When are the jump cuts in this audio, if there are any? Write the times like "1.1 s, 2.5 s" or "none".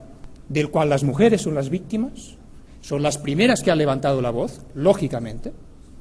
none